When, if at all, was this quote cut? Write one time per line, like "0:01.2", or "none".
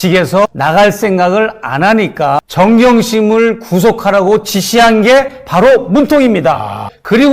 0:02.5

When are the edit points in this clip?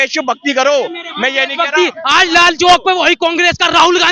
none

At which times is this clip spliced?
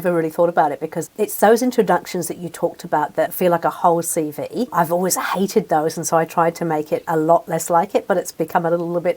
0:01.0
0:03.3
0:04.7

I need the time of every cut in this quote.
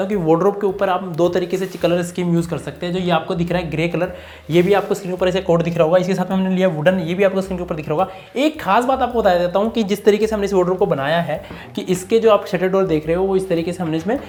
none

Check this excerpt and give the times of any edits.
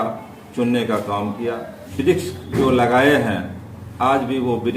0:01.8

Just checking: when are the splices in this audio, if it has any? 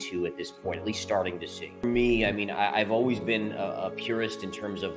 none

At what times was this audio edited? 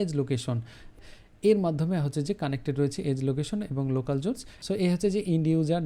0:00.9
0:04.5

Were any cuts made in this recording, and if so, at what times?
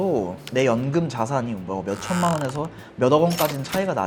none

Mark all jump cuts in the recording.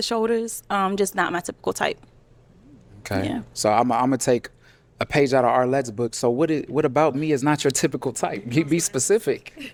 none

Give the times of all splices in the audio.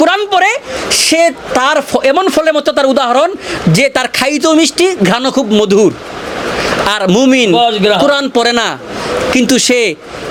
none

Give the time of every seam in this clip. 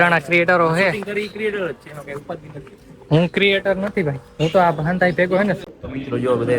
0:05.6

